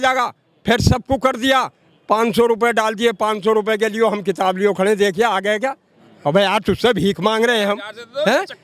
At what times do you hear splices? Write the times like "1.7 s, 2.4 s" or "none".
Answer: none